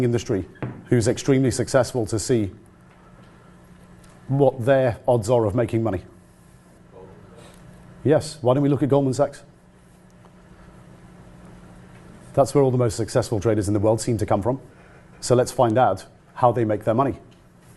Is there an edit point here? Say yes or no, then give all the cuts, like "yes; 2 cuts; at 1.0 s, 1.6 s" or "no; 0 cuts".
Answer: no; 0 cuts